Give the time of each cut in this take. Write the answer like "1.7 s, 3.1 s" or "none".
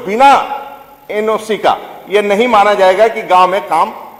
none